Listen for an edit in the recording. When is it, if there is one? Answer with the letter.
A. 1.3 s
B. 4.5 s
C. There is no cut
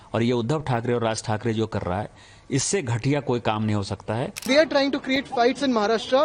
B